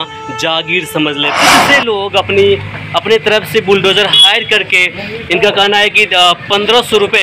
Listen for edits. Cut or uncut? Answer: cut